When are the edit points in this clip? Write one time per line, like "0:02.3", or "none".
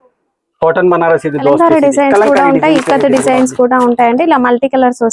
0:01.6